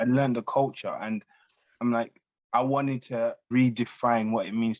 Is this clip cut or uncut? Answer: cut